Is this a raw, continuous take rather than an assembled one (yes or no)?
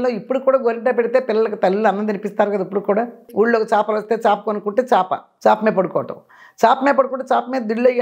no